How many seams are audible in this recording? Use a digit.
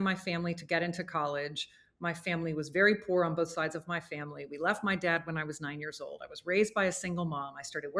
0